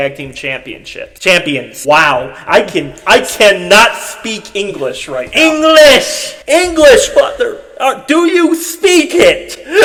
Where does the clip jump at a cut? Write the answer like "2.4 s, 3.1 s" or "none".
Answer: none